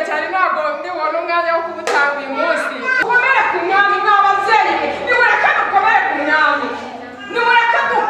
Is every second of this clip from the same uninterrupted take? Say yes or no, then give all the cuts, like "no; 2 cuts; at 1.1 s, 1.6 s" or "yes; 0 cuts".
no; 1 cut; at 3.0 s